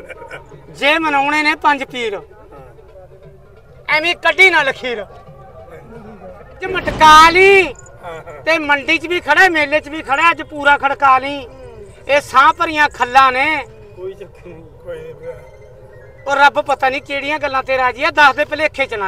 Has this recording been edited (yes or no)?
yes